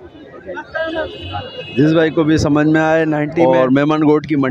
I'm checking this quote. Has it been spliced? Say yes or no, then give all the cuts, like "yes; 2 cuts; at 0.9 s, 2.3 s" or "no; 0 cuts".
yes; 1 cut; at 3.3 s